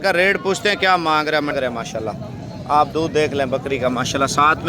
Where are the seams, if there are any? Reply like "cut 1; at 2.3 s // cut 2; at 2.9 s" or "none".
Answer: cut 1; at 1.5 s

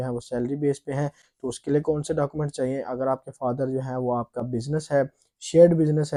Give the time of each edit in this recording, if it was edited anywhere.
none

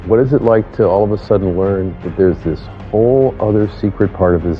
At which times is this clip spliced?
none

